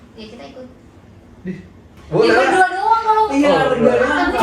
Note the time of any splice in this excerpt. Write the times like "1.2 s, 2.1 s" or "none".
1.9 s